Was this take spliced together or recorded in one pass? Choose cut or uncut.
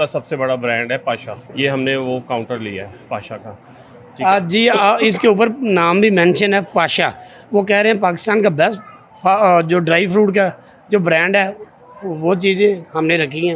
uncut